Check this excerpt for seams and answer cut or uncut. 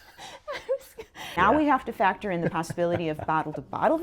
cut